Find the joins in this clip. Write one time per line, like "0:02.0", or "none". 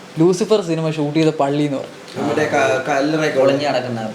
none